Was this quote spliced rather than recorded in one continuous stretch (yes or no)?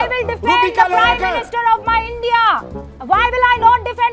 no